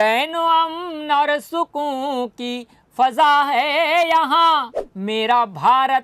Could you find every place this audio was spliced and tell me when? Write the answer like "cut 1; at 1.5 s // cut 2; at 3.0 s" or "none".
cut 1; at 4.8 s